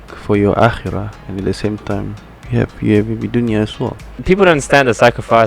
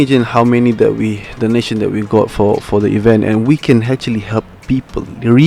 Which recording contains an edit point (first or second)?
first